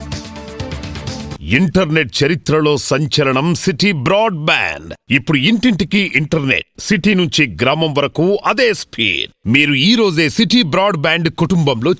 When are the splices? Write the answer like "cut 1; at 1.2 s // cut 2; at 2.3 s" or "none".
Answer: cut 1; at 1.3 s